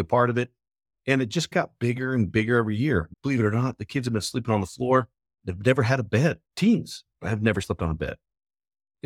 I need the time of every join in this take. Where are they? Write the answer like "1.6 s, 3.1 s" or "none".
3.1 s, 6.4 s, 7.6 s